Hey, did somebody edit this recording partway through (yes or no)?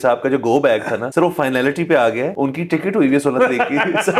yes